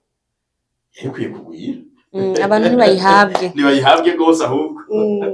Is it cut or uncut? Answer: uncut